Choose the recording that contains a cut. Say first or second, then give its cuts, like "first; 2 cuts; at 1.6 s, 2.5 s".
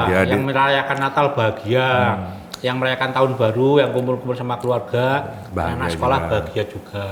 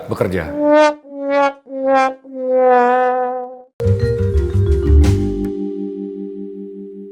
second; 1 cut; at 3.7 s